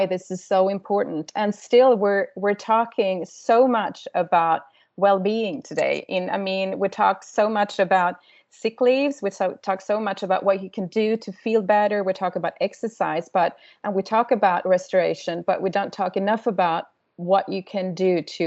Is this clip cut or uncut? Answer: uncut